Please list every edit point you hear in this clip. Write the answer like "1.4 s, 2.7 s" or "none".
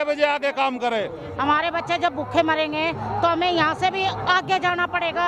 1.2 s